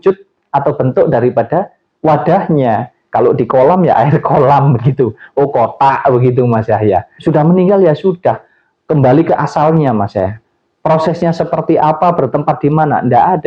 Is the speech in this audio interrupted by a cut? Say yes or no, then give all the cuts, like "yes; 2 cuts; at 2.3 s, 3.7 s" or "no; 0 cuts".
yes; 1 cut; at 7.2 s